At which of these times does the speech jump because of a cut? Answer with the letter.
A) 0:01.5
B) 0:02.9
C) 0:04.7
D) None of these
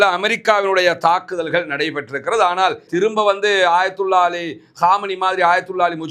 B